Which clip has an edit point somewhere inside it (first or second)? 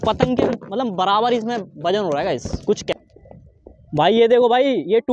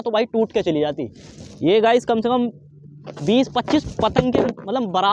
first